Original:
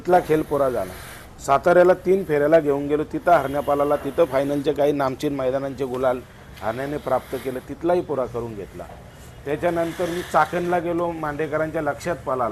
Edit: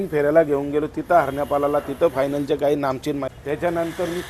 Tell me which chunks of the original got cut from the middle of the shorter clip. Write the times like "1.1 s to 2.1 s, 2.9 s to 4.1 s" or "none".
5.4 s to 9.2 s